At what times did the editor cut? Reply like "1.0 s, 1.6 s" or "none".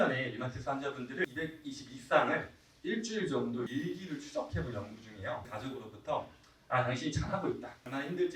1.3 s, 5.5 s